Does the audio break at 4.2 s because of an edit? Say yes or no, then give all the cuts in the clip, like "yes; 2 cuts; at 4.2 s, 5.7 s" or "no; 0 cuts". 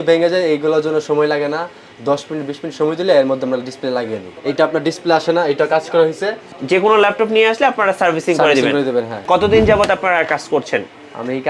yes; 3 cuts; at 4.2 s, 6.5 s, 9.2 s